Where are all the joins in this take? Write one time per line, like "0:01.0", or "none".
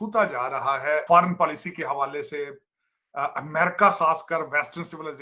0:01.0